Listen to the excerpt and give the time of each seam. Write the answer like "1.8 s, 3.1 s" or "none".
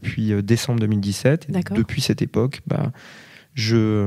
none